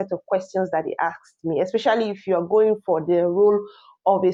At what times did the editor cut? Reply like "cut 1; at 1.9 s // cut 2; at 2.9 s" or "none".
none